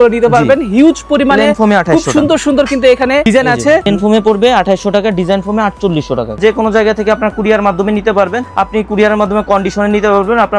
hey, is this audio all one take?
no; 3 cuts; at 3.4 s, 6.4 s, 8.4 s

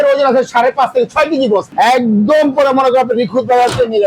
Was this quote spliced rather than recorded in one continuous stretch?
yes; 1 cut; at 1.7 s

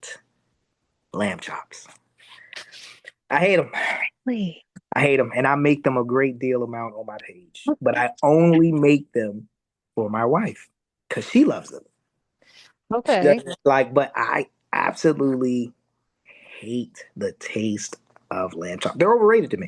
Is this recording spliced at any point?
no; 0 cuts

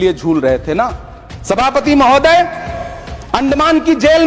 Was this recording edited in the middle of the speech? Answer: no; 0 cuts

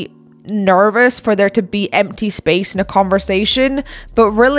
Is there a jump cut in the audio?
no; 0 cuts

